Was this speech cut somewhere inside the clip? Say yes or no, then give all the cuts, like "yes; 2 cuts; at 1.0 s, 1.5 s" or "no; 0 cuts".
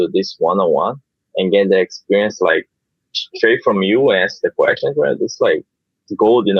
no; 0 cuts